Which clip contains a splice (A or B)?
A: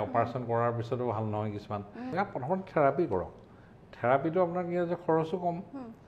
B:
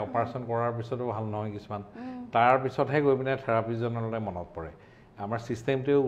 A